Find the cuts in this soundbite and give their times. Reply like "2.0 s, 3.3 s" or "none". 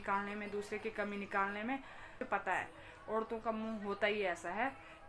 2.2 s